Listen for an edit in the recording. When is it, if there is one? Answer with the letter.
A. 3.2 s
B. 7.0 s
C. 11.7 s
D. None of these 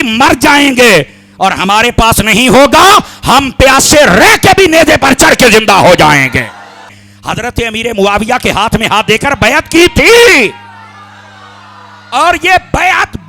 B